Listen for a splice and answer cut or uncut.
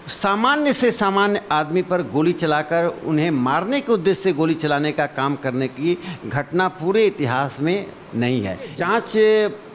cut